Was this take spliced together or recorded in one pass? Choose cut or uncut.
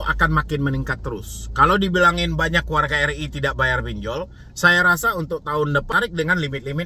cut